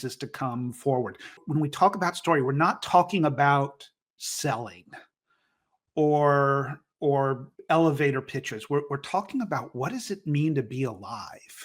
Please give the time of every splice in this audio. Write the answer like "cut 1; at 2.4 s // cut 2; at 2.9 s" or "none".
cut 1; at 1.4 s